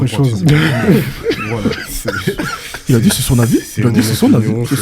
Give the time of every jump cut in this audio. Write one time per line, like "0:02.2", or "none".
none